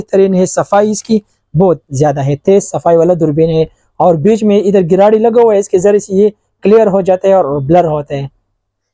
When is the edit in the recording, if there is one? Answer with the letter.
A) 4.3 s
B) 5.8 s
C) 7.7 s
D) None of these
D